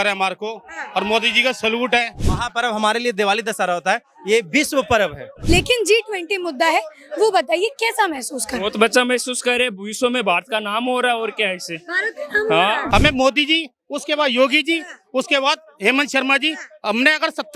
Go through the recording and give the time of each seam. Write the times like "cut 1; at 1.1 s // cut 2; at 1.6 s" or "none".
cut 1; at 2.3 s // cut 2; at 5.3 s // cut 3; at 12.8 s